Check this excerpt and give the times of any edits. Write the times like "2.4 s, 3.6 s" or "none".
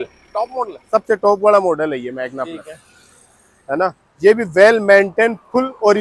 none